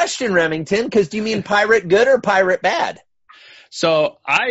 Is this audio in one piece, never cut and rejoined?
yes; 0 cuts

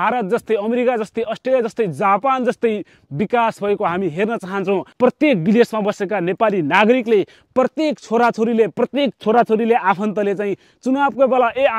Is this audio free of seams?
no; 1 cut; at 4.9 s

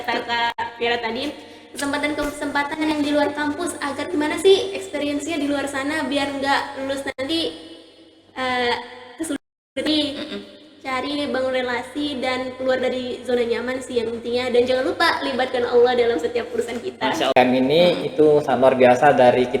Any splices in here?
yes; 1 cut; at 17.3 s

